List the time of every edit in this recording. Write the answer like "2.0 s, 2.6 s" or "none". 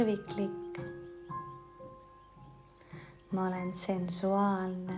0.8 s, 3.3 s